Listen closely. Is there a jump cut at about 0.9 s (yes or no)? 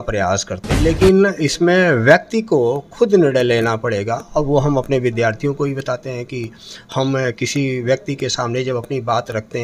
yes